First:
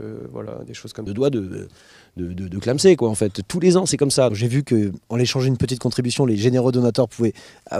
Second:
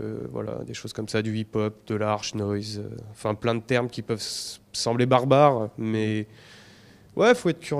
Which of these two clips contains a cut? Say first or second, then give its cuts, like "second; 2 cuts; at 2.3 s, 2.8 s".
second; 1 cut; at 1.0 s